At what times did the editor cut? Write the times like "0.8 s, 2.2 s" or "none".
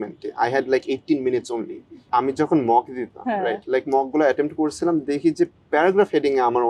2.0 s